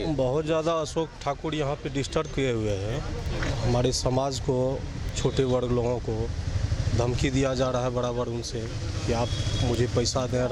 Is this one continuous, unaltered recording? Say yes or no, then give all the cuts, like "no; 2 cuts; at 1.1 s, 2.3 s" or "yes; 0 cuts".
yes; 0 cuts